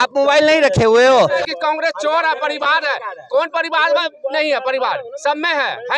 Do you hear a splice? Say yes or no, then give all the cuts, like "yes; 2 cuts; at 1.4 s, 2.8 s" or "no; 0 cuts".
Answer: yes; 1 cut; at 1.5 s